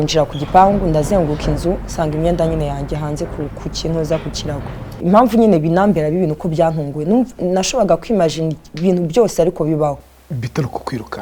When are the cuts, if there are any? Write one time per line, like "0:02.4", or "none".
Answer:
0:04.9

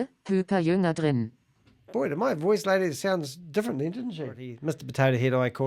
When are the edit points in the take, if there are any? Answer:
0:04.6

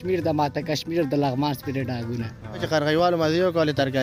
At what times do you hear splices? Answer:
0:02.6

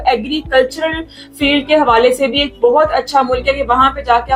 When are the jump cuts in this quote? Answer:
none

